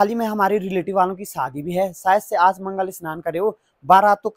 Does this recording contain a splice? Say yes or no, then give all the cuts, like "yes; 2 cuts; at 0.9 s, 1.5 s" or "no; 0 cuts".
no; 0 cuts